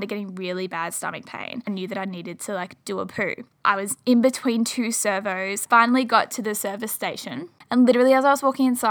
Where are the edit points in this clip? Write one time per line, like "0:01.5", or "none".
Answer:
0:01.7
0:03.5
0:05.6
0:07.5